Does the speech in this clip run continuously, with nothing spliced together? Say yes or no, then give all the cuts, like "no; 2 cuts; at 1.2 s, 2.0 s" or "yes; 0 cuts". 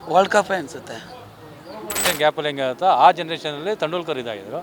no; 1 cut; at 2.0 s